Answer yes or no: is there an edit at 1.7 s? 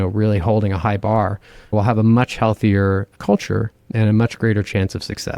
yes